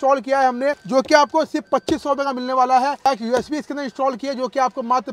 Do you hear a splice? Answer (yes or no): yes